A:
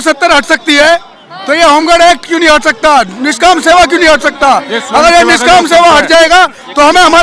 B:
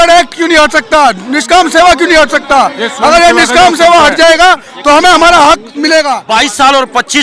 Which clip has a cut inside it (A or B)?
B